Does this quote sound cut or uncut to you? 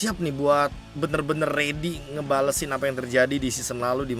uncut